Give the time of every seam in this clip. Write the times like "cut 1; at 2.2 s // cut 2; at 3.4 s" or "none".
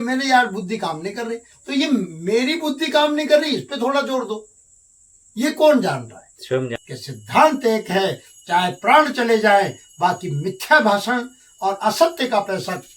cut 1; at 6.8 s